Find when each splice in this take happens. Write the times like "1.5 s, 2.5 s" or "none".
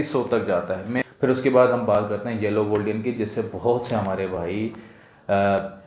1.0 s